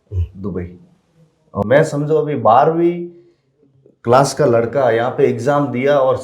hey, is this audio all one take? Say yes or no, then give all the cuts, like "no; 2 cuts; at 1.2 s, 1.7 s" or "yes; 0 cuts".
no; 1 cut; at 1.6 s